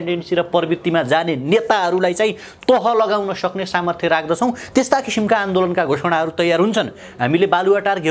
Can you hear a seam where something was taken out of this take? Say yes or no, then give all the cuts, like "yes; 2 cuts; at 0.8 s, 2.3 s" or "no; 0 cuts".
no; 0 cuts